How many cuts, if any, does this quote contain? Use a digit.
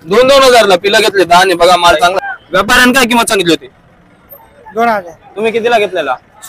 1